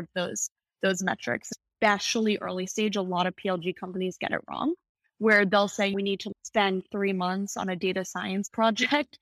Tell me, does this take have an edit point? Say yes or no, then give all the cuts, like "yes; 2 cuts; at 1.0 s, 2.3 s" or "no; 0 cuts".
yes; 2 cuts; at 1.5 s, 6.0 s